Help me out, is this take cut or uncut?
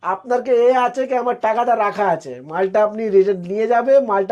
uncut